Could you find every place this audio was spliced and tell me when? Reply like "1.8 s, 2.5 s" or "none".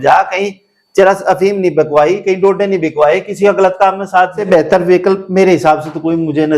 4.4 s